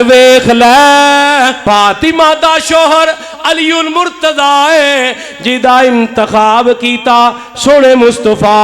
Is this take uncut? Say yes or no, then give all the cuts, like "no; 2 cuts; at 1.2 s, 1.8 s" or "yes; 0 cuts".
no; 1 cut; at 1.6 s